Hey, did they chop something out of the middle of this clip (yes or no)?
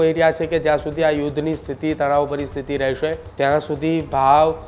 yes